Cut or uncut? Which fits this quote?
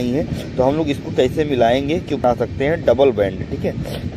cut